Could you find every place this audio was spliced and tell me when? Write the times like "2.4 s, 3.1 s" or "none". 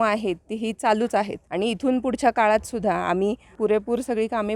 1.4 s, 3.6 s